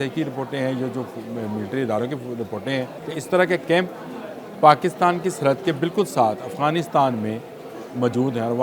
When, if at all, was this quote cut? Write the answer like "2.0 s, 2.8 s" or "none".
3.0 s